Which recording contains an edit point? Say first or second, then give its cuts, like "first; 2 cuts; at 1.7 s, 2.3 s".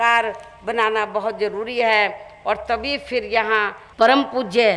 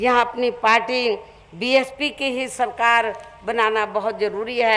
first; 1 cut; at 3.8 s